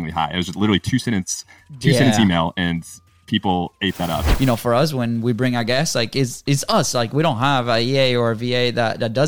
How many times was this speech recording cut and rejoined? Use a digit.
1